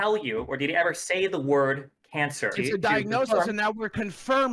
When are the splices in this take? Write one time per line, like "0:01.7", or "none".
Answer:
0:02.5